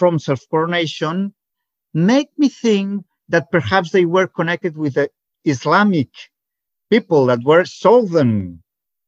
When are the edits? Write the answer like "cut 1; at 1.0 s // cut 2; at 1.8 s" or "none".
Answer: none

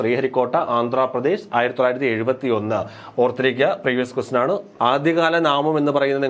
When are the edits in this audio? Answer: cut 1; at 4.7 s

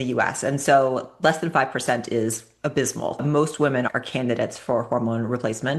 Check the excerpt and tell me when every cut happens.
cut 1; at 3.2 s

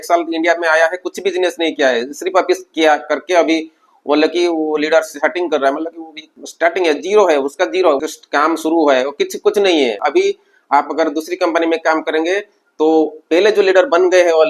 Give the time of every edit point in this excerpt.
cut 1; at 10.0 s

